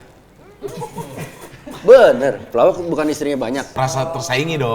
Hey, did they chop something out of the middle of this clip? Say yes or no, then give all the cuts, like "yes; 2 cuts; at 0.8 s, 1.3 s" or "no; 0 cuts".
yes; 1 cut; at 3.8 s